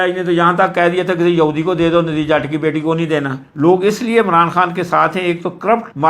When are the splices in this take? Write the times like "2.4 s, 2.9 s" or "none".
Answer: 3.5 s